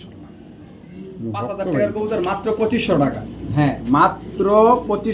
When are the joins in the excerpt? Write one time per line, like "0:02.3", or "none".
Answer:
0:01.8